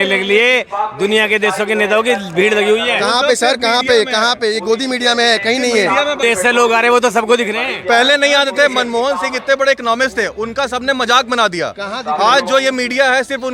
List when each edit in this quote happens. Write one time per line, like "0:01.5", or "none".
0:06.2